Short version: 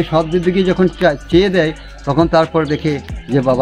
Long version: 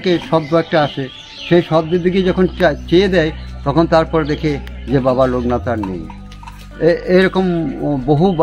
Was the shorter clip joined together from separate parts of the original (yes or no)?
no